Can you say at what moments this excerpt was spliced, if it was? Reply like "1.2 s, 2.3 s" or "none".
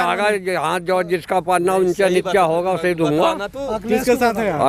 none